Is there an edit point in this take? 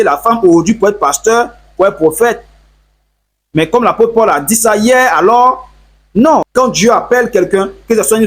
yes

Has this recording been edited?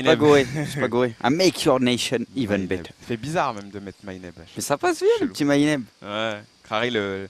no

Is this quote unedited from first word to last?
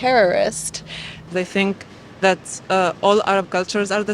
no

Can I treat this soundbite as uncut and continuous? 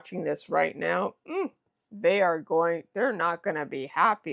yes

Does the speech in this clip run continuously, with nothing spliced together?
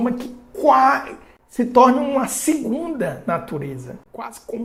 yes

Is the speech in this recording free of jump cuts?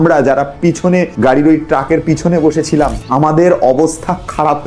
no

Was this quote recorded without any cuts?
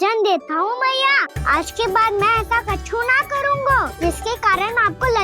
no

